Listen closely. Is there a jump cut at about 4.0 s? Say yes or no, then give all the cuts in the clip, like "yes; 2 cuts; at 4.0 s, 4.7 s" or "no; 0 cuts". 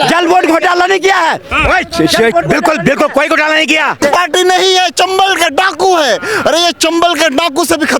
yes; 1 cut; at 4.0 s